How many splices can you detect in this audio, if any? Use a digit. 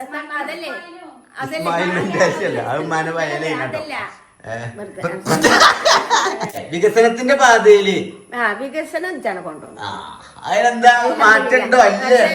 1